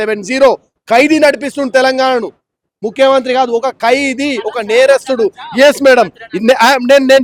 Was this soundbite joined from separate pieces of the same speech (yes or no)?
no